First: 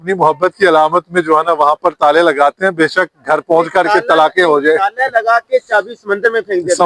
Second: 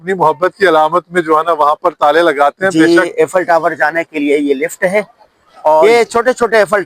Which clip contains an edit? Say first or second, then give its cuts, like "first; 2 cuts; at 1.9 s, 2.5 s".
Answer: second; 2 cuts; at 2.7 s, 5.8 s